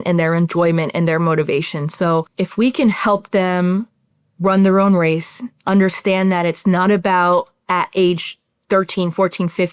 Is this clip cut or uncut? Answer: cut